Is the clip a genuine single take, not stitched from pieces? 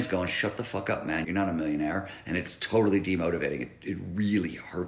no; 1 cut; at 1.3 s

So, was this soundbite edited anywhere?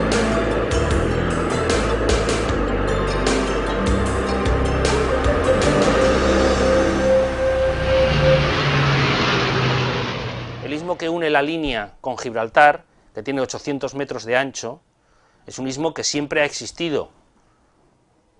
no; 0 cuts

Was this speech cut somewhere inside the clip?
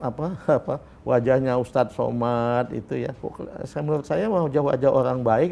yes; 1 cut; at 3.2 s

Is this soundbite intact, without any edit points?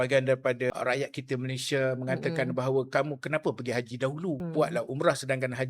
no; 2 cuts; at 0.7 s, 4.4 s

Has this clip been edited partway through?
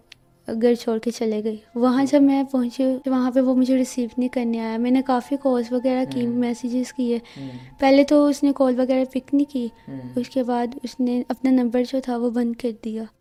no; 0 cuts

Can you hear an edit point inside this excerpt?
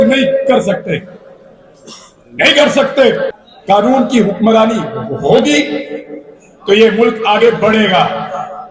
yes; 1 cut; at 3.3 s

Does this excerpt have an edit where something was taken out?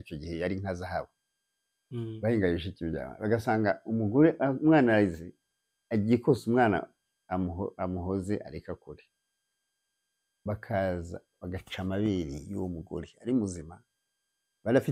no; 0 cuts

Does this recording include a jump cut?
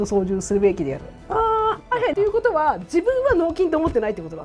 yes; 1 cut; at 1.8 s

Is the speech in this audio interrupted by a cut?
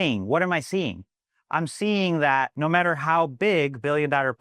yes; 1 cut; at 2.5 s

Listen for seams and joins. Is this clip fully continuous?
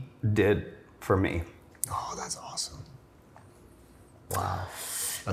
yes; 0 cuts

